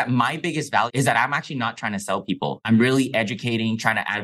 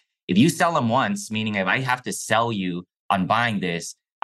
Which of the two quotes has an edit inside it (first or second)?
first